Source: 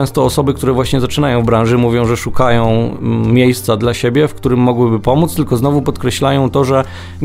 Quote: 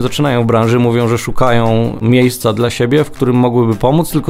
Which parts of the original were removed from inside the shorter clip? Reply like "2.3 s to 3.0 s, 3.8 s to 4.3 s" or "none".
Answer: 3.0 s to 3.2 s